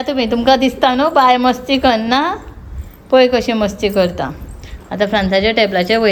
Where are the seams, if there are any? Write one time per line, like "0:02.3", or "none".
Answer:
none